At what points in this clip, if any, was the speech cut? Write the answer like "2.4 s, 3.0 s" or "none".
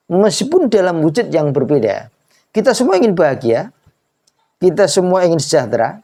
none